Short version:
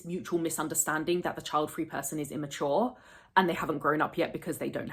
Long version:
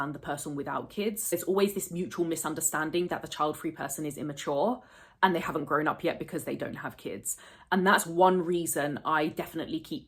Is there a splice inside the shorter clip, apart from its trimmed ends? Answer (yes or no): no